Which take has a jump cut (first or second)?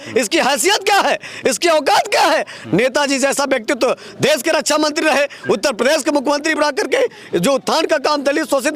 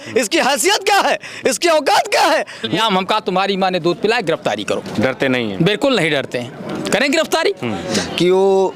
second